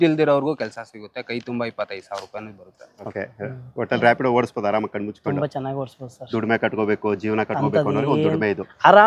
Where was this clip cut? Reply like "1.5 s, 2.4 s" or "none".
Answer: 3.0 s